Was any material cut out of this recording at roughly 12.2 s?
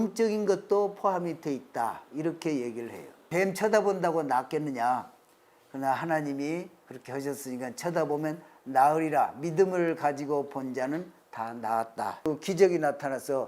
yes; 2 cuts; at 3.3 s, 12.2 s

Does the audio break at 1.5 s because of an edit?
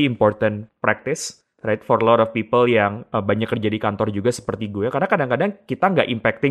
no; 0 cuts

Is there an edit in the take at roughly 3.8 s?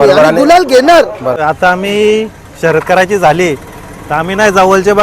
no; 1 cut; at 1.4 s

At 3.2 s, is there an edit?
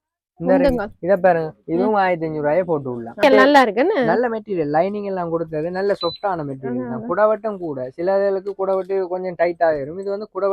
yes; 1 cut; at 3.2 s

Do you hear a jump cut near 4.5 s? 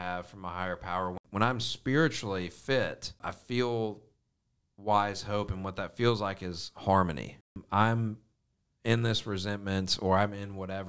no; 3 cuts; at 1.2 s, 3.3 s, 7.5 s

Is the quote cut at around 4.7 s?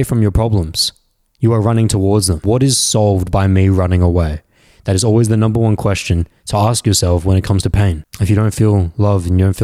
no; 2 cuts; at 2.4 s, 8.1 s

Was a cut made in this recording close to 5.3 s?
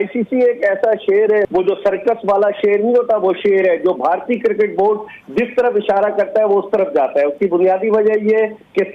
no; 1 cut; at 1.4 s

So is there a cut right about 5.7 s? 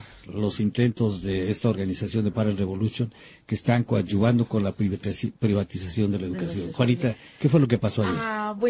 no; 1 cut; at 1.7 s

